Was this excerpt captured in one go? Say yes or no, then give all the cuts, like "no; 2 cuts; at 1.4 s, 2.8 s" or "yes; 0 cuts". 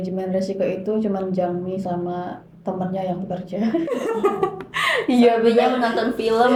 yes; 0 cuts